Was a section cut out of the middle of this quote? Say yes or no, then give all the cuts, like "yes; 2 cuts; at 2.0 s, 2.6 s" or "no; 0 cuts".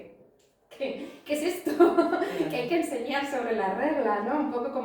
no; 0 cuts